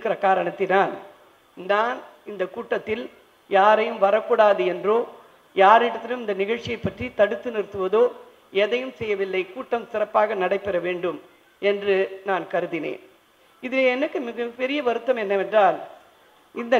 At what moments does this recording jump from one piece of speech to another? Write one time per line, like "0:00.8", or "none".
none